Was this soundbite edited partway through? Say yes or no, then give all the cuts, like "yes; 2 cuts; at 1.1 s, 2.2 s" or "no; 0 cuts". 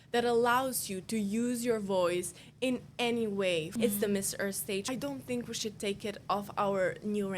yes; 3 cuts; at 3.7 s, 4.9 s, 6.2 s